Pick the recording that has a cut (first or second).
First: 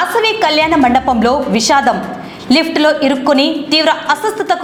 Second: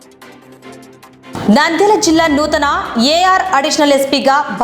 second